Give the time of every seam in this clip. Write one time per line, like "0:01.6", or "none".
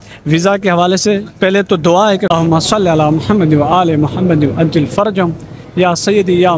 0:02.3